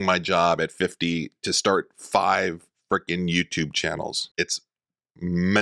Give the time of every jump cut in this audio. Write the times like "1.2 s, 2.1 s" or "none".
4.2 s